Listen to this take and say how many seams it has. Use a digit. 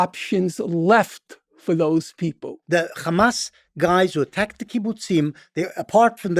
1